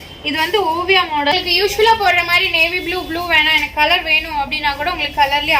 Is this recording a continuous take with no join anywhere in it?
no; 1 cut; at 1.3 s

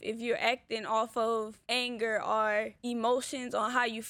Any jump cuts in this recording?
yes; 2 cuts; at 1.6 s, 2.8 s

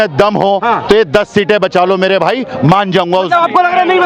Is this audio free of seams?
yes; 0 cuts

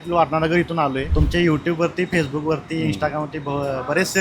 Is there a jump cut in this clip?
yes; 1 cut; at 1.1 s

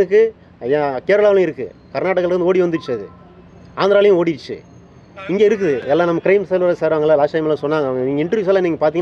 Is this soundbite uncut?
yes; 0 cuts

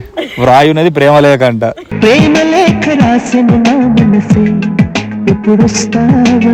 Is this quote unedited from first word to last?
yes; 0 cuts

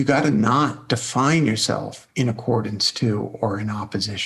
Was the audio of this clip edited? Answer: no; 0 cuts

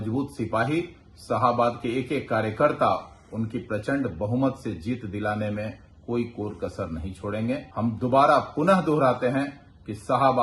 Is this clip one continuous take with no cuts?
no; 1 cut; at 7.7 s

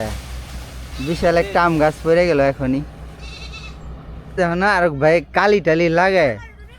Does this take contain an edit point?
yes; 1 cut; at 4.3 s

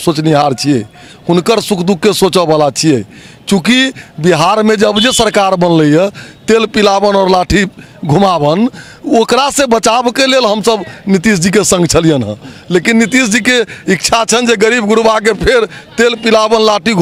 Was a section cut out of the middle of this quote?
no; 0 cuts

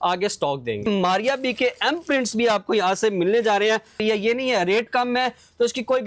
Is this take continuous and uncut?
no; 2 cuts; at 0.9 s, 4.0 s

